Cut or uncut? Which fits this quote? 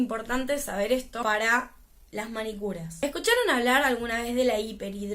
cut